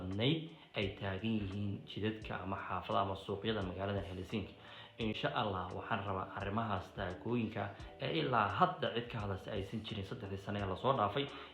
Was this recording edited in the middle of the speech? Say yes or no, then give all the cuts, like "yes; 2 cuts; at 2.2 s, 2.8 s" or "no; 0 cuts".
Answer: yes; 1 cut; at 5.2 s